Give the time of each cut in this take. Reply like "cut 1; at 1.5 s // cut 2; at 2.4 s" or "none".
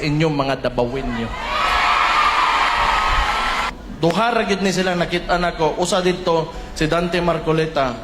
cut 1; at 3.8 s

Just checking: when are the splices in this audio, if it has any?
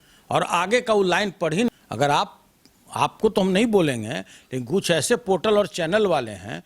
cut 1; at 1.7 s

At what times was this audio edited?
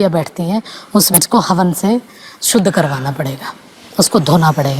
cut 1; at 1.2 s

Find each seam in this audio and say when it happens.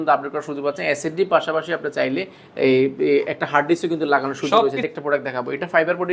cut 1; at 4.8 s

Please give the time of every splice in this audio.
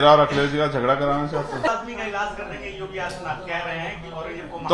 cut 1; at 1.7 s

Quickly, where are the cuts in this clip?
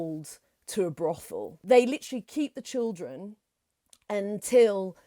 cut 1; at 1.5 s

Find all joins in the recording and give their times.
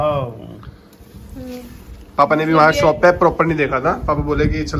none

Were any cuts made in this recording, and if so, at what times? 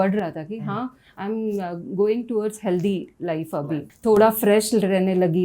cut 1; at 3.9 s

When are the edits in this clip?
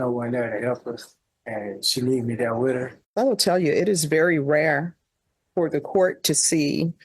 cut 1; at 3.0 s

